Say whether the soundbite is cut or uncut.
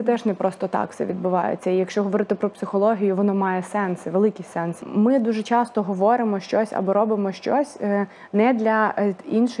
cut